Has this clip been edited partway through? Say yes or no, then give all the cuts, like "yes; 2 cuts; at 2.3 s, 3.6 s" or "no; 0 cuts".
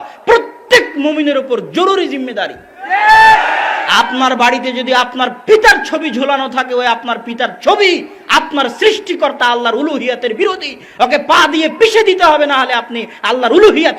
no; 0 cuts